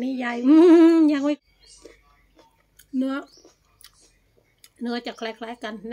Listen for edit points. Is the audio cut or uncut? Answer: cut